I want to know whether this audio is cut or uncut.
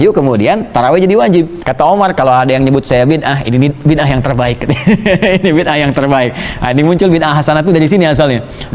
cut